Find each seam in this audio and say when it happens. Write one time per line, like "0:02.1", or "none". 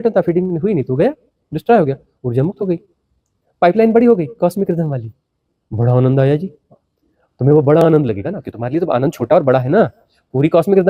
none